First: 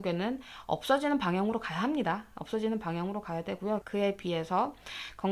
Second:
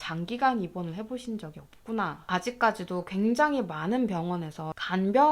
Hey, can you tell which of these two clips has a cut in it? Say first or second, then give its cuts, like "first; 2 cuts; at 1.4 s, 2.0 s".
second; 1 cut; at 2.2 s